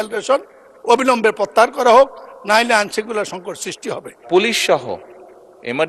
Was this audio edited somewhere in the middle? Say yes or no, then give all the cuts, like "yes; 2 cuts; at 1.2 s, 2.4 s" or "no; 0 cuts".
yes; 1 cut; at 4.2 s